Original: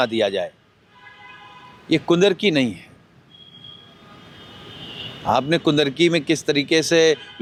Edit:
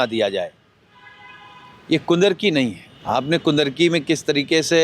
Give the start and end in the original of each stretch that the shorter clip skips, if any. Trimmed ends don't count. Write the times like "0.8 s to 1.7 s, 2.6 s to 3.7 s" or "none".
2.9 s to 5.1 s